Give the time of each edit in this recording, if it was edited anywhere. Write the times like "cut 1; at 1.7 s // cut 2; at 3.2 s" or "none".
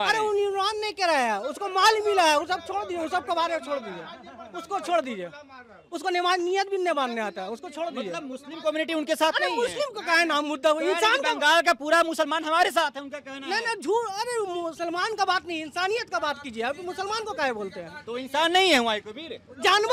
none